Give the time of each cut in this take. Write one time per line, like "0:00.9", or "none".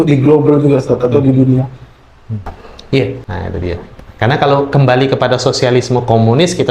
0:03.2